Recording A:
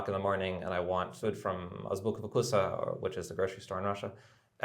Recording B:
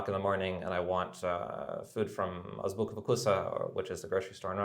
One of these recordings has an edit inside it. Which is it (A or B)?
A